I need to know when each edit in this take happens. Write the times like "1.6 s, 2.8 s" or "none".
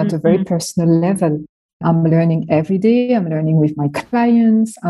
1.8 s